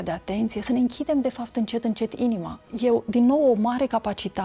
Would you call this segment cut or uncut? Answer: cut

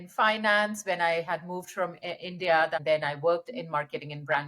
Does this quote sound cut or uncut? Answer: cut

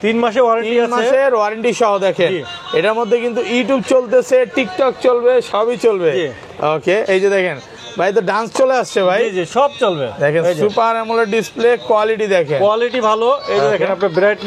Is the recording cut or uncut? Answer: uncut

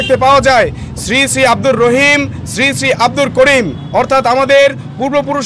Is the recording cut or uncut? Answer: uncut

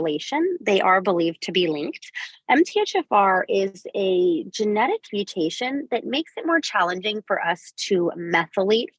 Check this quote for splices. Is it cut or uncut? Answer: uncut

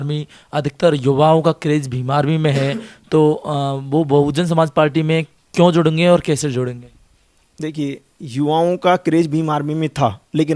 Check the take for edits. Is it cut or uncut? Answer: uncut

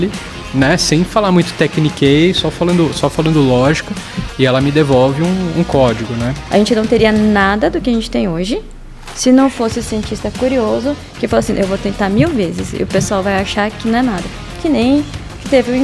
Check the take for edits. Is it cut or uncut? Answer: cut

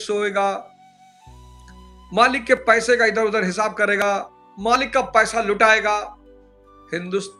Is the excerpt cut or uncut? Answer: uncut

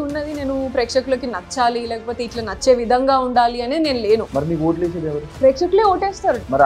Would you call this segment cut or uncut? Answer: uncut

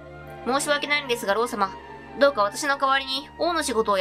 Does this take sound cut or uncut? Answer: uncut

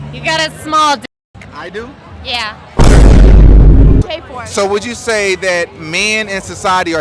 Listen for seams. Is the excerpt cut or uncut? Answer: cut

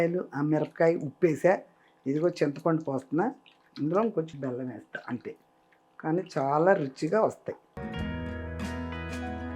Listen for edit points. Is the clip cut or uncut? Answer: cut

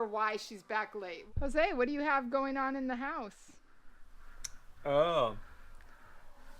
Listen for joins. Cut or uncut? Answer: cut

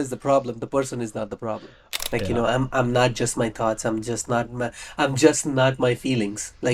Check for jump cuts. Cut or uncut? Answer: cut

